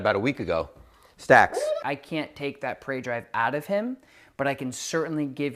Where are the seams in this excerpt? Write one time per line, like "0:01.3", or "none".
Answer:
0:01.8